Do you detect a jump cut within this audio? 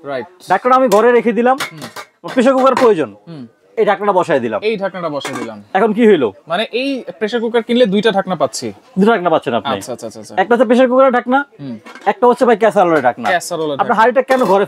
no; 0 cuts

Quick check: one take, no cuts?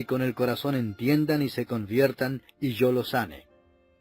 yes; 0 cuts

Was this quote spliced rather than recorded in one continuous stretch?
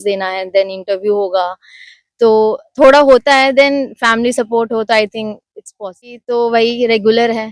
yes; 1 cut; at 6.2 s

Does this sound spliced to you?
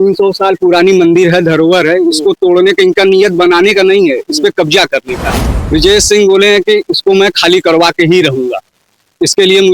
yes; 1 cut; at 5.6 s

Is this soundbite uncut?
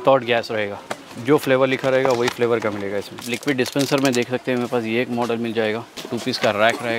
no; 3 cuts; at 1.0 s, 3.3 s, 6.1 s

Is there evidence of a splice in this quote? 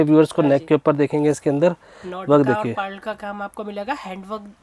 no; 0 cuts

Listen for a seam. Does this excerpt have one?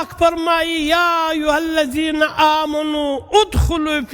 no; 0 cuts

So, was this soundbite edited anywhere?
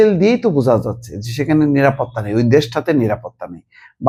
no; 0 cuts

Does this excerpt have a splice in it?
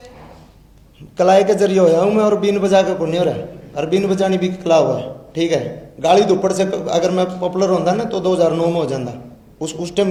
no; 0 cuts

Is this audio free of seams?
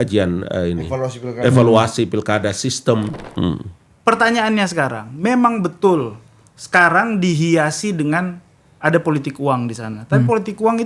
no; 1 cut; at 3.2 s

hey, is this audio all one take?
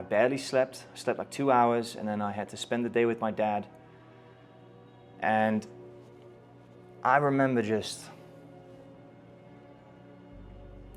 yes; 0 cuts

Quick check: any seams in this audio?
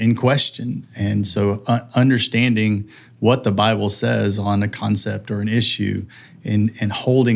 no; 0 cuts

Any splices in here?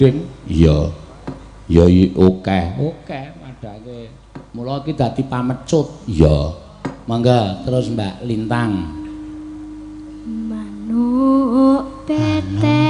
no; 0 cuts

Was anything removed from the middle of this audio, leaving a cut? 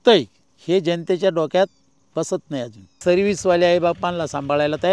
yes; 1 cut; at 3.0 s

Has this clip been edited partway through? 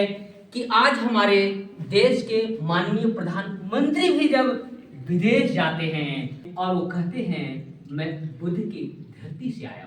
yes; 1 cut; at 6.4 s

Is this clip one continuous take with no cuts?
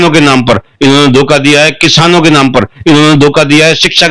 yes; 0 cuts

